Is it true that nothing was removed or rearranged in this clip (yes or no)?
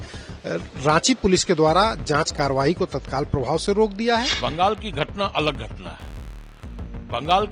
no